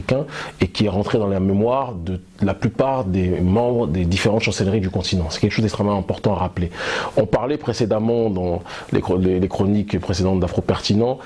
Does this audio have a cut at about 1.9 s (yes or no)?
no